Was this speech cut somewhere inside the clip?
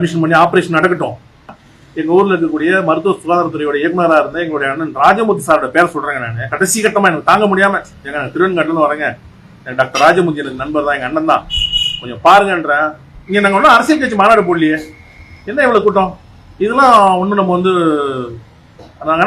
yes; 1 cut; at 1.7 s

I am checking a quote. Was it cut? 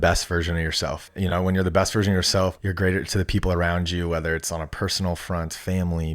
yes; 2 cuts; at 1.1 s, 2.6 s

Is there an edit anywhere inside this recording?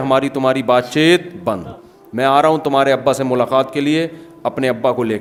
no; 0 cuts

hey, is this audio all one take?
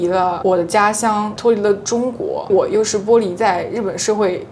no; 2 cuts; at 1.3 s, 2.5 s

